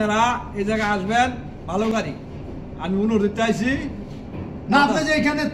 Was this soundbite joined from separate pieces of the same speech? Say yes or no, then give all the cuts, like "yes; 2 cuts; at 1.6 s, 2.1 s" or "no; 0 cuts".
no; 0 cuts